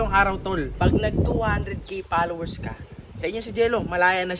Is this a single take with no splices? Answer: yes; 0 cuts

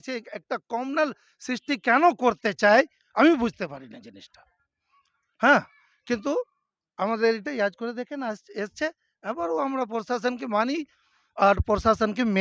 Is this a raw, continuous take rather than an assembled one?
yes; 0 cuts

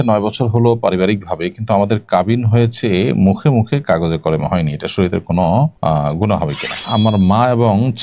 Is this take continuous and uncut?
no; 2 cuts; at 5.7 s, 6.8 s

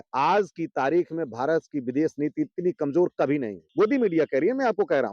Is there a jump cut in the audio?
yes; 1 cut; at 3.6 s

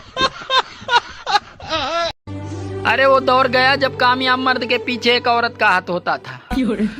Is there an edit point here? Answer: yes; 1 cut; at 2.3 s

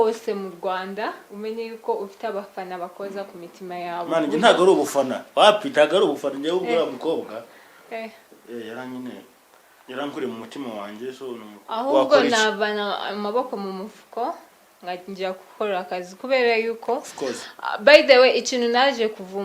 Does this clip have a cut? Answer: yes; 1 cut; at 11.5 s

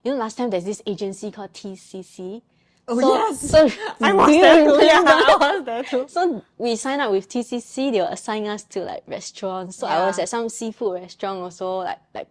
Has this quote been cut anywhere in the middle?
no; 0 cuts

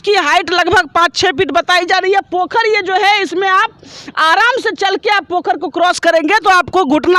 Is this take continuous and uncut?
yes; 0 cuts

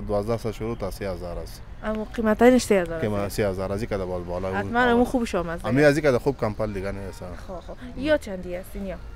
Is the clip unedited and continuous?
yes; 0 cuts

